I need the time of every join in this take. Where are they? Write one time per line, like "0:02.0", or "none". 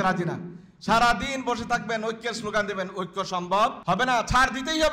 0:03.8

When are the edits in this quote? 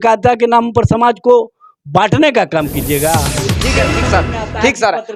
0:03.4

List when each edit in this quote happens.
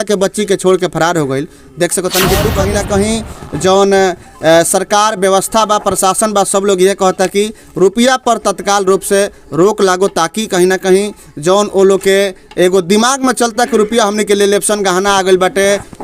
0:02.6

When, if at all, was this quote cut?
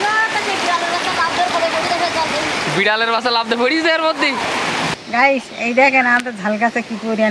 0:05.0

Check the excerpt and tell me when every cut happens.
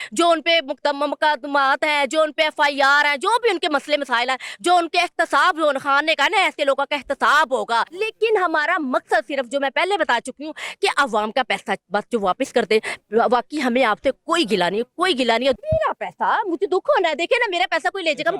0:08.0
0:15.6

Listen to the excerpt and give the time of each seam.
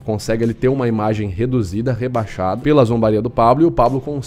0:02.6

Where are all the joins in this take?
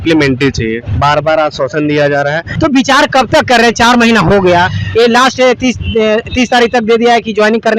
0:02.5

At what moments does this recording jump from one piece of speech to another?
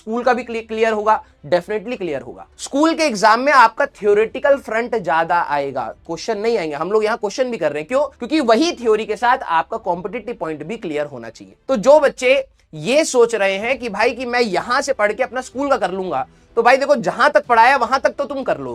none

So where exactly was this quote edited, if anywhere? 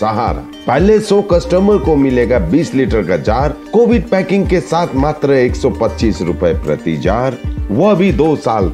none

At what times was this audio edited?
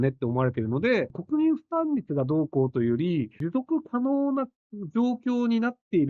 0:01.2
0:03.4

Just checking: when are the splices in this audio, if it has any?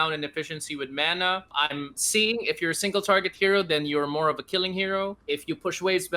0:01.5
0:05.2

